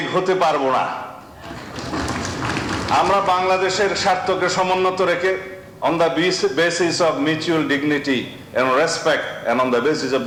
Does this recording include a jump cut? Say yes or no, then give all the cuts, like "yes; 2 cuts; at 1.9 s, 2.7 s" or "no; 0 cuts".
no; 0 cuts